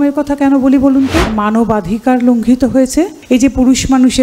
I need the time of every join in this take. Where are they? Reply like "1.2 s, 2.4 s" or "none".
1.3 s, 3.2 s